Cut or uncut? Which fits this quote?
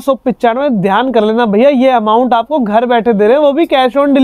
uncut